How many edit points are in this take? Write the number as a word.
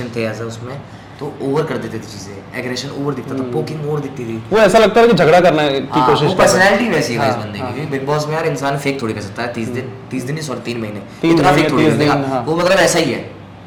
zero